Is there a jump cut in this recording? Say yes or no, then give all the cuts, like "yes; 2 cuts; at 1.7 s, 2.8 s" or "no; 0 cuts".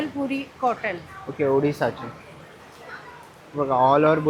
no; 0 cuts